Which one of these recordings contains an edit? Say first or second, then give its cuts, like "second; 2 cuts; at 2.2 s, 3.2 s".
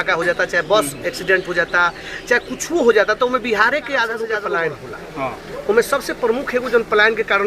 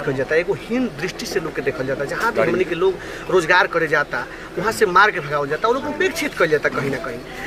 first; 1 cut; at 4.3 s